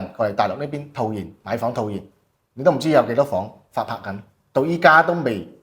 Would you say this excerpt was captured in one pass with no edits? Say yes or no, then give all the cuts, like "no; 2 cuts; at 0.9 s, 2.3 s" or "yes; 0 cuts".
yes; 0 cuts